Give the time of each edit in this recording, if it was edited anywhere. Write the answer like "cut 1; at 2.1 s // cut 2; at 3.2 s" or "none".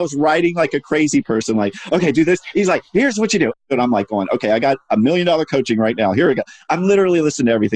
cut 1; at 3.6 s